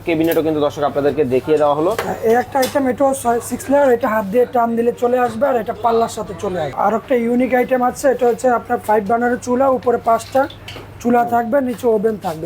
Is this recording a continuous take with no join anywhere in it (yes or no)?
no